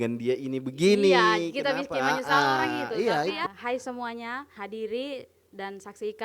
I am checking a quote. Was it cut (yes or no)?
yes